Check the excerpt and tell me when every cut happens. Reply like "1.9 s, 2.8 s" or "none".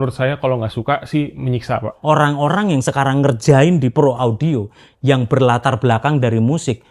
1.9 s